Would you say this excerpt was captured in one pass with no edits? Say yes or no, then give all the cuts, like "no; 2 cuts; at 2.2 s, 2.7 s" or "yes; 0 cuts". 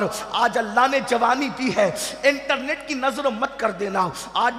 yes; 0 cuts